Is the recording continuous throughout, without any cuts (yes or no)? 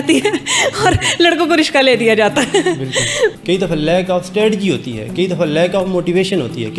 no